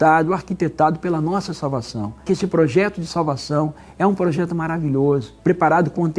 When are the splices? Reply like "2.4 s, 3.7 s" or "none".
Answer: 2.3 s, 5.3 s